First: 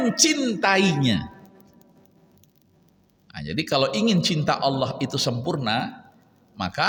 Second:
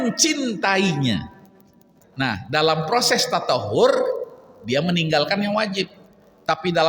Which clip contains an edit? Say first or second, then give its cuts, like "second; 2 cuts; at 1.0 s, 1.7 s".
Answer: second; 1 cut; at 2.0 s